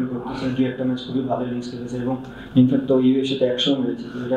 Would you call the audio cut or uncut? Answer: uncut